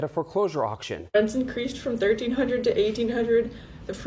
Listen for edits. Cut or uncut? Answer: cut